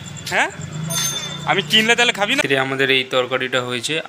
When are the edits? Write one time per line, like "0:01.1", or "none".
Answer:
0:02.4